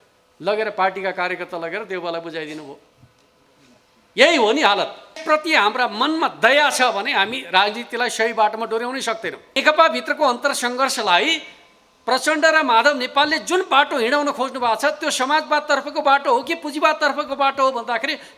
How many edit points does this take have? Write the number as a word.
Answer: two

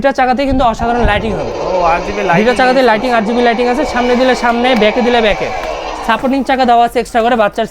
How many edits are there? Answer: zero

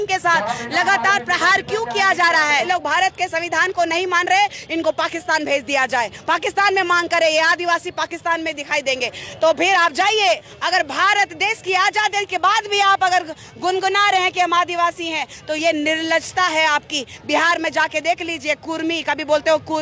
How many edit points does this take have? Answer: two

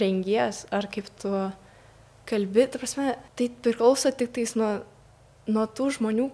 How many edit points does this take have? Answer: one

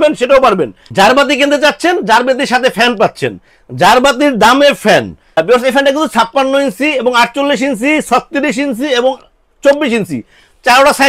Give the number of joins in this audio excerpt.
two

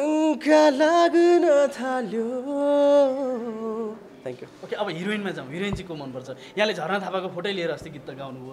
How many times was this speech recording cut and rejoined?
zero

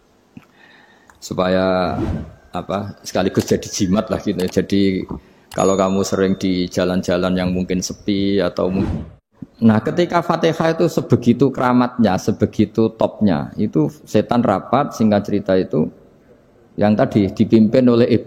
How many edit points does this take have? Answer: one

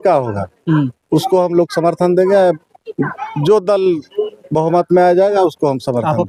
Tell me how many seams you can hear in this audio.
zero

